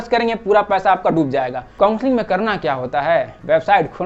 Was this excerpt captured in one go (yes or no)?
no